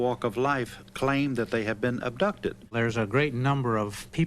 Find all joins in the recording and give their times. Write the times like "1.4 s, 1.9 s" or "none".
2.7 s